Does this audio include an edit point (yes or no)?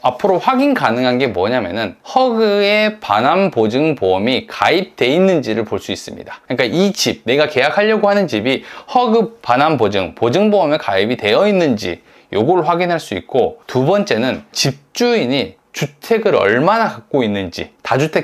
no